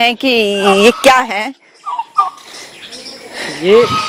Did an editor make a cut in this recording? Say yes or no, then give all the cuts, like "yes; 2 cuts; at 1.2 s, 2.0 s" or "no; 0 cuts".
no; 0 cuts